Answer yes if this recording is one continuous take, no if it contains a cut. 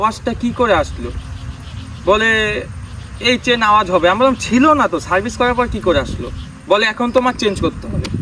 yes